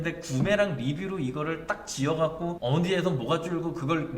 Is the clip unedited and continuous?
no; 1 cut; at 2.6 s

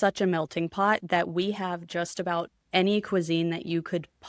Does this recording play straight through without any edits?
yes; 0 cuts

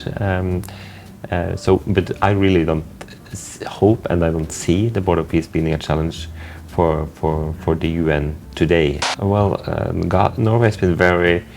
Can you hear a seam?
yes; 1 cut; at 9.1 s

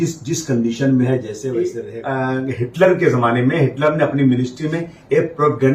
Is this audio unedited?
no; 1 cut; at 1.8 s

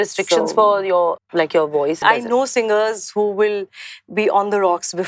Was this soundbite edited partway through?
yes; 2 cuts; at 1.2 s, 2.0 s

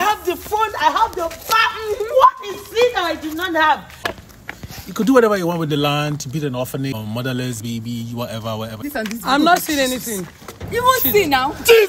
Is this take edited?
yes; 3 cuts; at 4.0 s, 6.9 s, 8.9 s

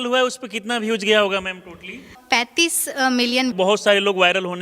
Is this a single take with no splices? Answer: no; 2 cuts; at 2.2 s, 3.5 s

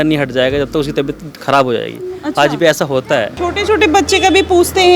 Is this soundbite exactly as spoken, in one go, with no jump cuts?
no; 1 cut; at 3.3 s

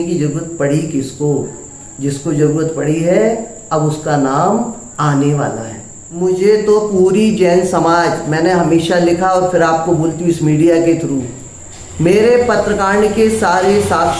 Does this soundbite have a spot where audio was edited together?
yes; 1 cut; at 6.0 s

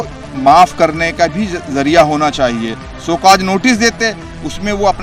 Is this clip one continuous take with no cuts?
yes; 0 cuts

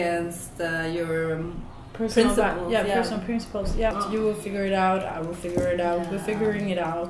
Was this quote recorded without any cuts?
no; 1 cut; at 4.0 s

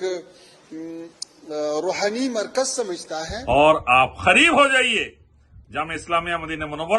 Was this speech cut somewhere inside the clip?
yes; 1 cut; at 3.3 s

